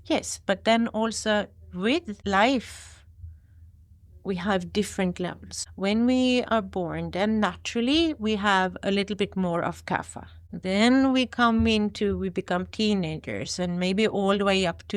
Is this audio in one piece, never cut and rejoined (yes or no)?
yes